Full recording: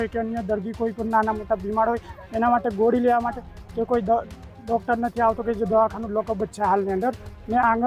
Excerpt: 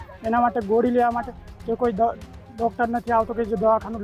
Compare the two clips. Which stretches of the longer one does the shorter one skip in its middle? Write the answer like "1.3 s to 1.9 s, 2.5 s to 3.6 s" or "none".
none